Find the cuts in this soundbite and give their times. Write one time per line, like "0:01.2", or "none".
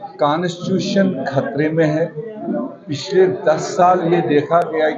none